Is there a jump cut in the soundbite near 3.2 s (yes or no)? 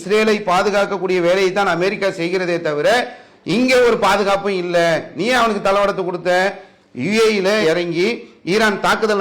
no